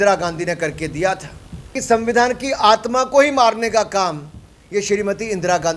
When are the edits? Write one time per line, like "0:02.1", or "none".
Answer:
0:01.8